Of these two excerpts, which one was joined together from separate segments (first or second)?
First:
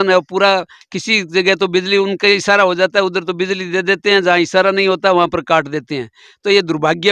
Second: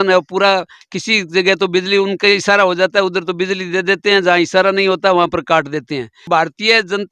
second